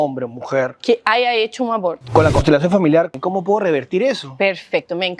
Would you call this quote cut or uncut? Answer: cut